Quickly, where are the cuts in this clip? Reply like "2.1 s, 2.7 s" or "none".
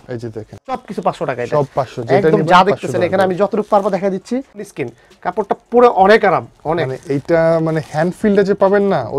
0.8 s, 4.7 s